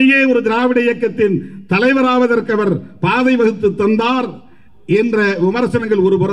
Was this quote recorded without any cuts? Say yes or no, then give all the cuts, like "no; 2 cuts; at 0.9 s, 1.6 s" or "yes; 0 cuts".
yes; 0 cuts